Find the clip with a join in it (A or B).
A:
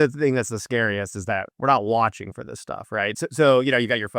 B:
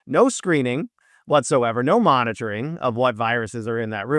A